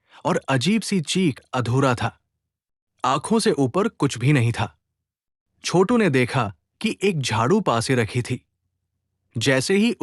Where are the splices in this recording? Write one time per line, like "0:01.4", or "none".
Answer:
0:01.5